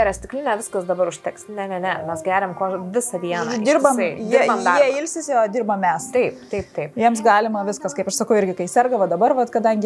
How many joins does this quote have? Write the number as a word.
zero